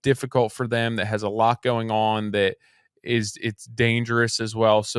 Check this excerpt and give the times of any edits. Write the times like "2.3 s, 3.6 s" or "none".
none